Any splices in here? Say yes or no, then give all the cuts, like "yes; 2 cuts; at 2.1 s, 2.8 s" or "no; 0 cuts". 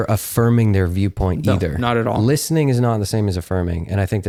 no; 0 cuts